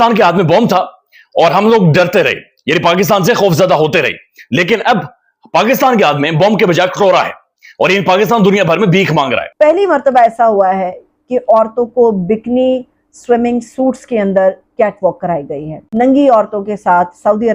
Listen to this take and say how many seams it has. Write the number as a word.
two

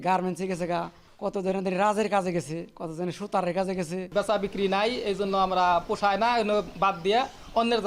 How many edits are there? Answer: two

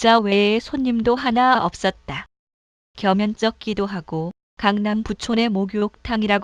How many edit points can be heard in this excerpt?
one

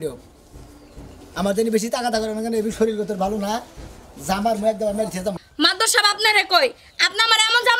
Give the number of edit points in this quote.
one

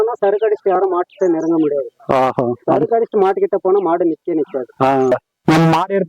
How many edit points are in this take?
one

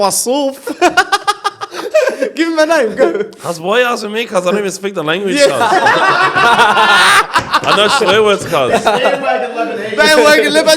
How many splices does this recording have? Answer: zero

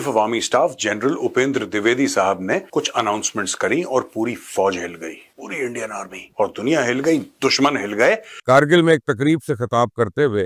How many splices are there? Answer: one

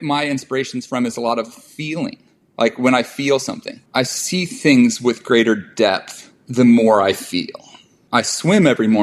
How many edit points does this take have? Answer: zero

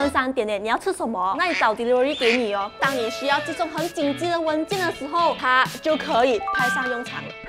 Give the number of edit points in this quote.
one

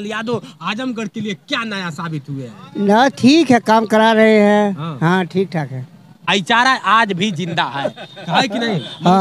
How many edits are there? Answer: one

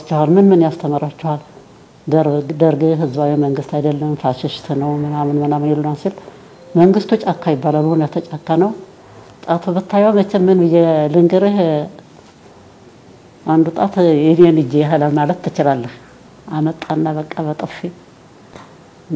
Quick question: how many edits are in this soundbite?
zero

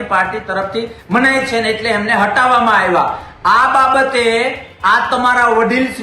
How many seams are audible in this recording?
zero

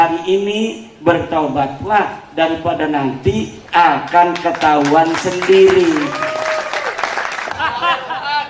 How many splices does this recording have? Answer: one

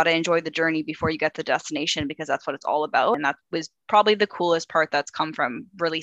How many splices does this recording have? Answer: one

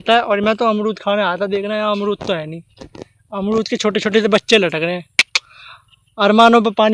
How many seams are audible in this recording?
zero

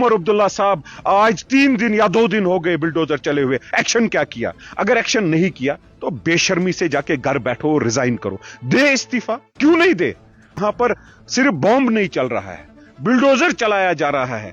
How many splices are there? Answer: one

